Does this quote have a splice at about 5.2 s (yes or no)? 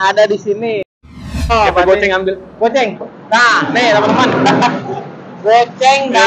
no